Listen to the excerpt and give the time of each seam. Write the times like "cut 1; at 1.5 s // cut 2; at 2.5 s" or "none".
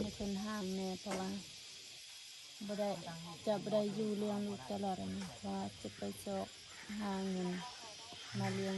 none